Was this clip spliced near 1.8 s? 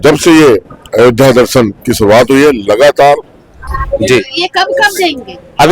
no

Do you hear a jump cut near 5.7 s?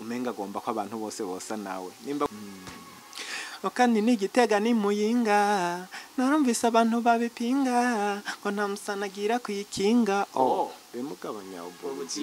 no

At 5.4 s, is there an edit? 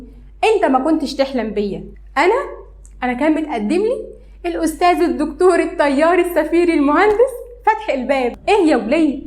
no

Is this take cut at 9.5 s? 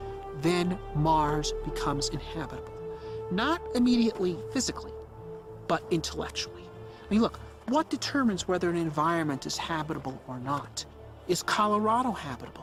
no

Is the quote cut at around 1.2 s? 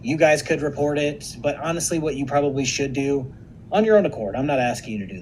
yes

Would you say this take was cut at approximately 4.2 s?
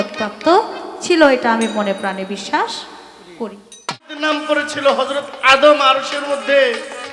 yes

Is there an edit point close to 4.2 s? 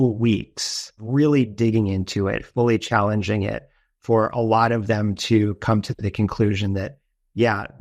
no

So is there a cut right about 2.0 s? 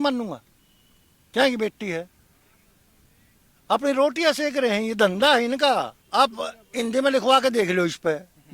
no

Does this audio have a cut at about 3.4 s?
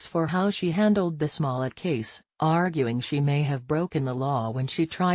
no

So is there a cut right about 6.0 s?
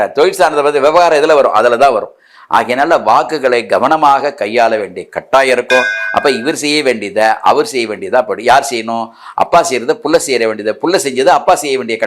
yes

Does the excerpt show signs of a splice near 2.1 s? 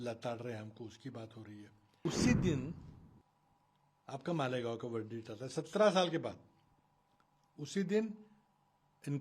yes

